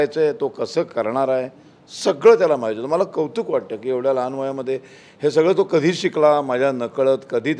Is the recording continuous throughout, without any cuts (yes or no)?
yes